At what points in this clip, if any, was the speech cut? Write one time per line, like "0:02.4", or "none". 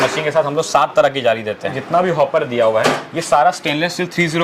0:01.8